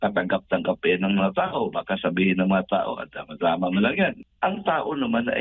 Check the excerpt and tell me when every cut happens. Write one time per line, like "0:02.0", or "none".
0:04.2